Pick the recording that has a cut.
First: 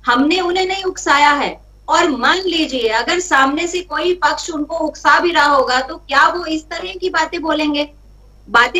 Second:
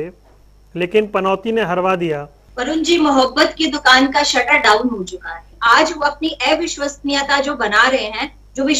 second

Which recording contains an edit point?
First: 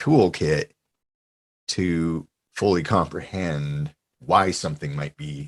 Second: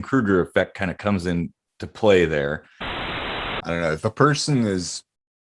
second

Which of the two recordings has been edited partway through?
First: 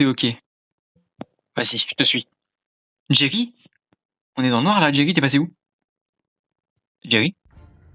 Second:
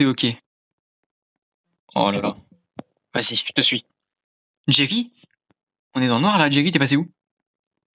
first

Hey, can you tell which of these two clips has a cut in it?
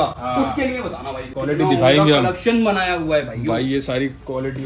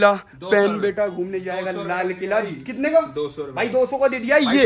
first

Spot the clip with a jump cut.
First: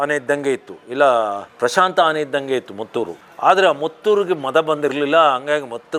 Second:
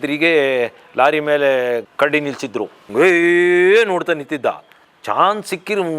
second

